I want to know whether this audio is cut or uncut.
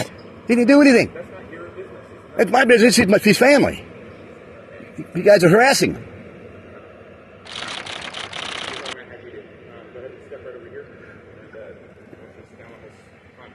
uncut